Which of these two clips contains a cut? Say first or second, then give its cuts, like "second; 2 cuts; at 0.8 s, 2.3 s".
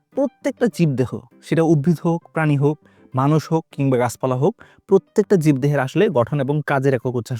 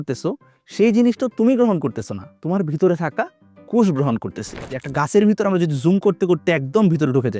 second; 1 cut; at 4.8 s